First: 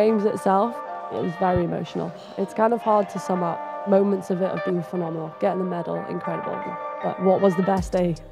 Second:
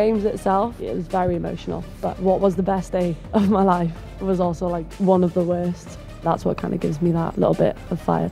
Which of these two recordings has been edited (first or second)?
second